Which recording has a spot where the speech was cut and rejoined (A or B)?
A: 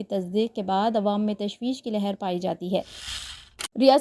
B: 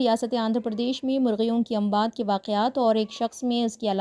A